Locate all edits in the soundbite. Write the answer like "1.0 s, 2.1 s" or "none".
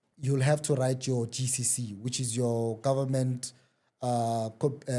none

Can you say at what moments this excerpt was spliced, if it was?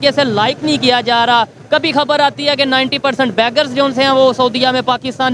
none

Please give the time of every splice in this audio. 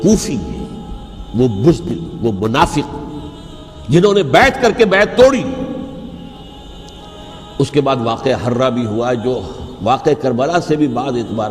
6.4 s

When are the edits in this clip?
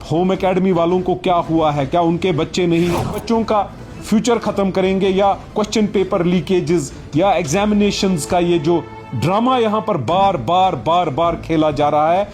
3.2 s

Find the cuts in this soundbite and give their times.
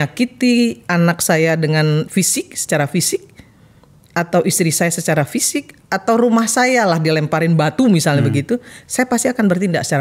none

